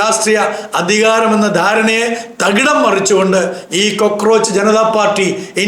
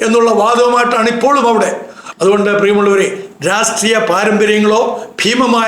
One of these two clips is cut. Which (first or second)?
second